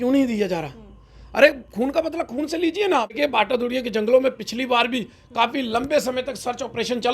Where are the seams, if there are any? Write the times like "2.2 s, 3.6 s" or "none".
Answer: 3.2 s